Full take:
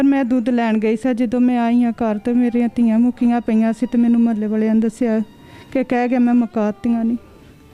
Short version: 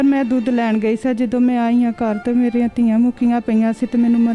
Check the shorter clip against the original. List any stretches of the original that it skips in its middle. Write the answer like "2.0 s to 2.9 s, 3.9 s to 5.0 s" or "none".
none